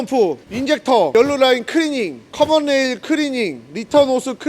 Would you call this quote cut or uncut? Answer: cut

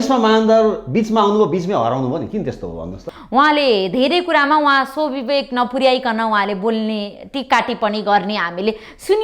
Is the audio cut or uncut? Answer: cut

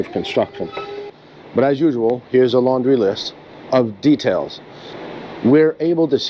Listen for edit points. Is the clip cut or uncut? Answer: cut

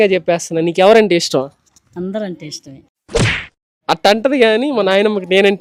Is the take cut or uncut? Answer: uncut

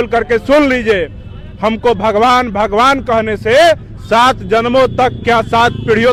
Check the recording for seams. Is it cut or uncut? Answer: uncut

